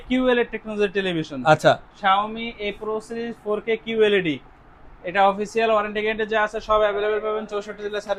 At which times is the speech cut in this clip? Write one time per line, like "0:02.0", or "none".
none